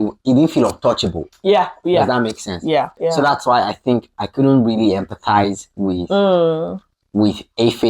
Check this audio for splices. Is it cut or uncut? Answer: cut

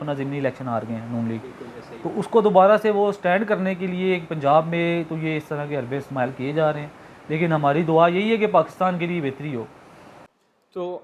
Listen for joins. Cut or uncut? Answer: uncut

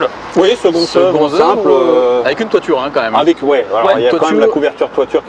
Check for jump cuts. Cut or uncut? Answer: uncut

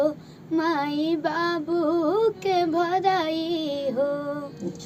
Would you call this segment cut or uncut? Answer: uncut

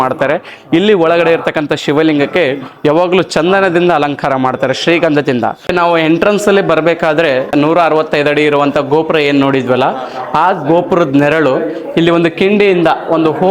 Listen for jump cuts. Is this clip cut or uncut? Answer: cut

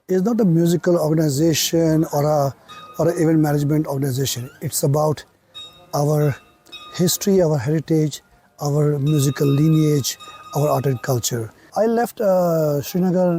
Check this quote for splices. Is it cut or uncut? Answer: cut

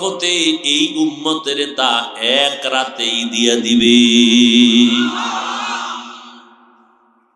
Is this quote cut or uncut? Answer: uncut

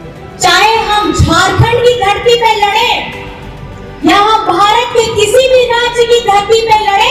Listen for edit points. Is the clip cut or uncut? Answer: uncut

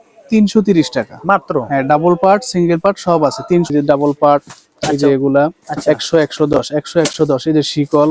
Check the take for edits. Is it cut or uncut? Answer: cut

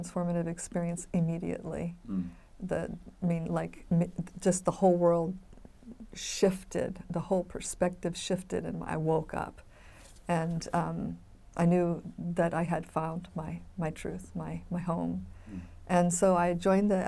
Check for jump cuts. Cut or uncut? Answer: uncut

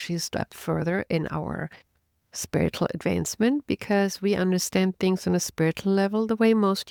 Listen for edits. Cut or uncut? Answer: uncut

